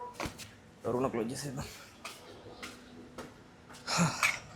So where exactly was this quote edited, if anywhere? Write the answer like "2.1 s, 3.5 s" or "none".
none

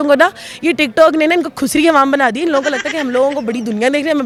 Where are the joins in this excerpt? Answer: none

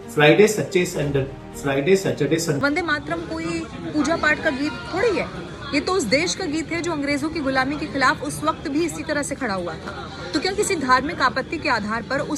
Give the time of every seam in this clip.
2.6 s

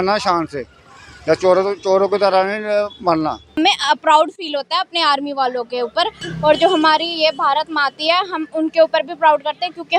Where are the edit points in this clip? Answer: 3.6 s, 6.2 s

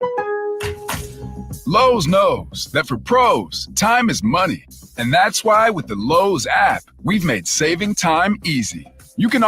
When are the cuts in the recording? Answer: 1.6 s

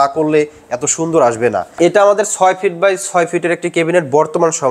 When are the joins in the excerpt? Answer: 1.8 s

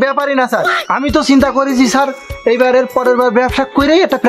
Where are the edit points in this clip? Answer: none

